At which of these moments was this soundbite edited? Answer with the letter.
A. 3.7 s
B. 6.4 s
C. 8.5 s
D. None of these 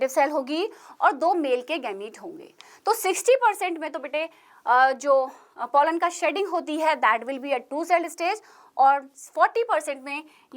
D